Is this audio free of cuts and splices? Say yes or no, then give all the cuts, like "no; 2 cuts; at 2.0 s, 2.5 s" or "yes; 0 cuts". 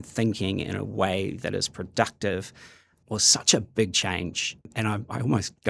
no; 1 cut; at 3.0 s